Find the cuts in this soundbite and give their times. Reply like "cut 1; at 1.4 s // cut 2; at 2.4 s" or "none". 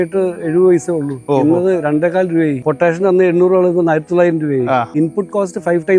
cut 1; at 2.6 s // cut 2; at 4.9 s